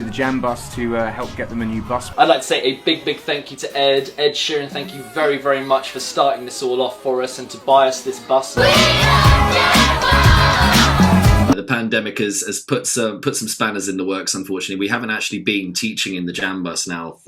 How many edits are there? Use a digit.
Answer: 3